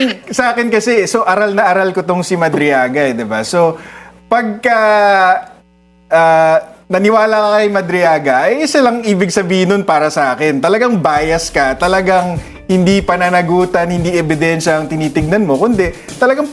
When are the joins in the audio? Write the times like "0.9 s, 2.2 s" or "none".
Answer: none